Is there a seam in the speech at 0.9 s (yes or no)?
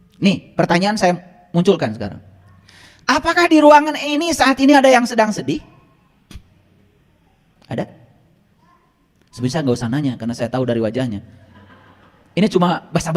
yes